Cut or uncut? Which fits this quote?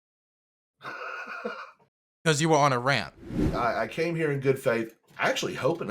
cut